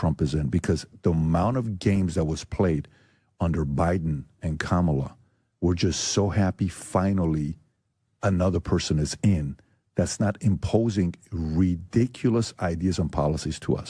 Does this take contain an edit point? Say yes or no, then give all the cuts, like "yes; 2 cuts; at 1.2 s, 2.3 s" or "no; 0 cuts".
no; 0 cuts